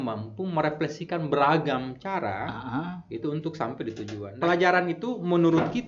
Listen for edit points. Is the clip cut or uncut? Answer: cut